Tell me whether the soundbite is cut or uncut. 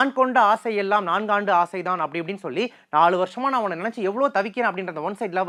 uncut